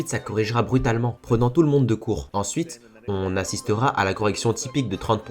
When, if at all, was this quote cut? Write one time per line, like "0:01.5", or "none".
0:02.3